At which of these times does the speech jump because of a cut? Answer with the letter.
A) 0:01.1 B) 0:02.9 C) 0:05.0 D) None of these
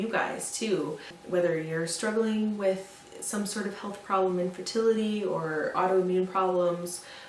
A